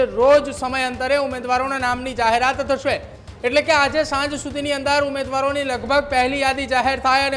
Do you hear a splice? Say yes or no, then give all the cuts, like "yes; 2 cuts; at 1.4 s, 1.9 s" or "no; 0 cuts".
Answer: no; 0 cuts